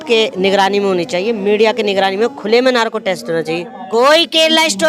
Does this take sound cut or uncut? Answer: cut